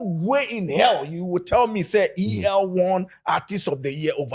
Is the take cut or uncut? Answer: uncut